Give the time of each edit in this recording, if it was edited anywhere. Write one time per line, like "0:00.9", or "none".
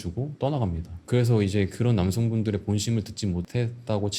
0:00.9